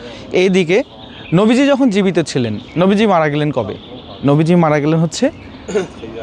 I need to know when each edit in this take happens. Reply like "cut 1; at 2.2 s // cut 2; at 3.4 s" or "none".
none